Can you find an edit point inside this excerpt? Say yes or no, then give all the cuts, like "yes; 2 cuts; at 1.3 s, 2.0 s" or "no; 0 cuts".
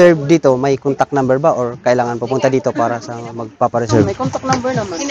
no; 0 cuts